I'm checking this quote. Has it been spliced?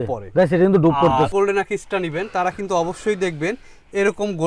yes; 1 cut; at 1.3 s

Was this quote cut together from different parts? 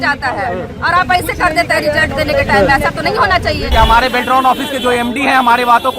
yes; 1 cut; at 3.6 s

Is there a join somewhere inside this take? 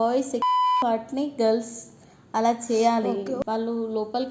yes; 1 cut; at 3.4 s

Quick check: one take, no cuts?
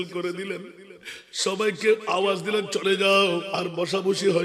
no; 1 cut; at 3.5 s

